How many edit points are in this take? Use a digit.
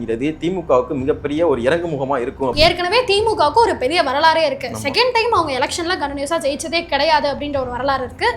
1